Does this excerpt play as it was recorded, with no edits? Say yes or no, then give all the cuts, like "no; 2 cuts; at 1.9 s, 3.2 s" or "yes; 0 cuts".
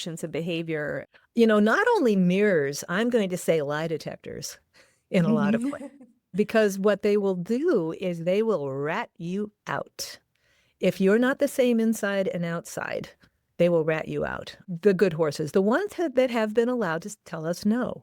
no; 1 cut; at 1.1 s